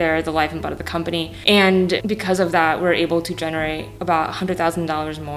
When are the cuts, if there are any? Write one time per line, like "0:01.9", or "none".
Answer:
0:02.1